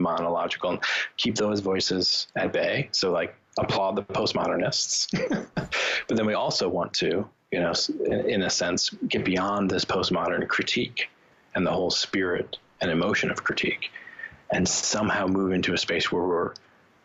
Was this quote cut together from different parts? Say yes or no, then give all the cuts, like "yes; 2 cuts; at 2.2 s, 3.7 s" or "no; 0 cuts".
no; 0 cuts